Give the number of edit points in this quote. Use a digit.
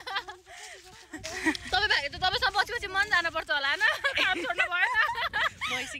1